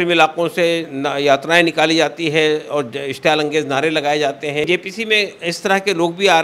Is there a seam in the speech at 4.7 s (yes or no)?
yes